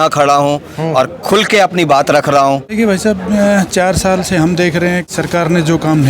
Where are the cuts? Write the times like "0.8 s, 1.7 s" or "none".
2.6 s, 5.1 s